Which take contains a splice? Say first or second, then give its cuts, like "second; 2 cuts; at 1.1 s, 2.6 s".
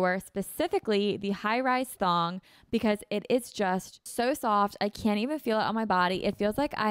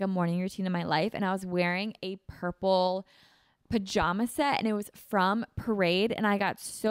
first; 1 cut; at 4.1 s